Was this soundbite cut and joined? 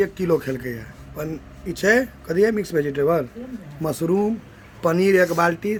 no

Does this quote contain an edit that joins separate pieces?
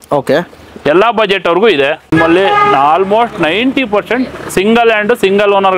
yes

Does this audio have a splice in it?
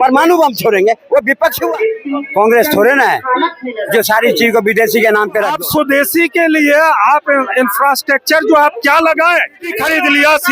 yes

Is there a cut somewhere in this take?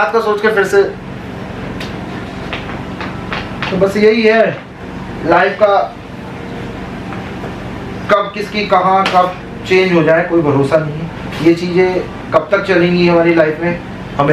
no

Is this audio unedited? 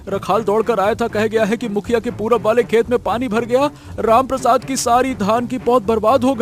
yes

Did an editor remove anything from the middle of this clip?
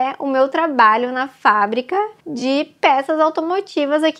no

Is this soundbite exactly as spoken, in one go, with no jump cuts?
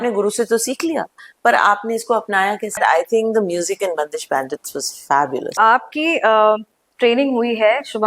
no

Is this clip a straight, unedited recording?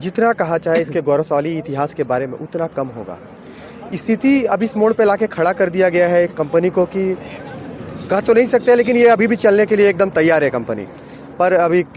yes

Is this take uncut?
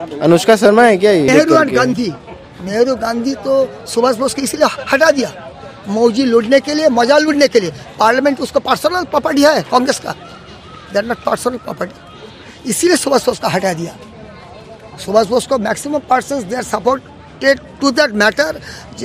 no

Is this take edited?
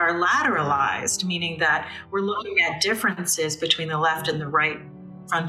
no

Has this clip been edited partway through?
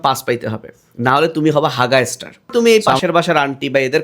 yes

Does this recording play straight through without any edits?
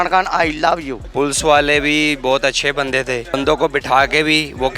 no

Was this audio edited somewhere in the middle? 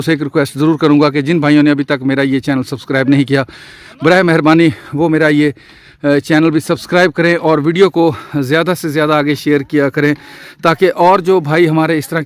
no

